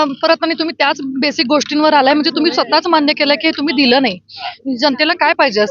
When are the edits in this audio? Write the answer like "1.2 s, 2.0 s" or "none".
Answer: 4.6 s